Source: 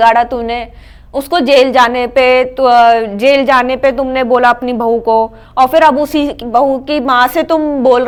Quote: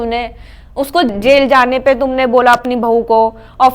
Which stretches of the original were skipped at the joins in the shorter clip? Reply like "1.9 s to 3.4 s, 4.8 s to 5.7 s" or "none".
1.5 s to 3.1 s